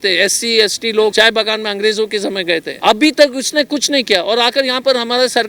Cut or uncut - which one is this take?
cut